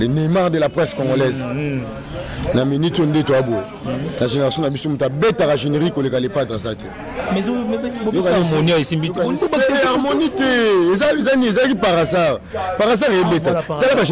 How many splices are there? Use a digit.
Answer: 0